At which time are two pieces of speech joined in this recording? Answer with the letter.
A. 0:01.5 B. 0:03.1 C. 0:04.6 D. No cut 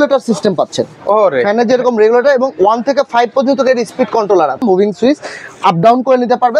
C